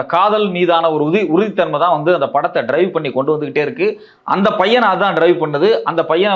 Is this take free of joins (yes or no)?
yes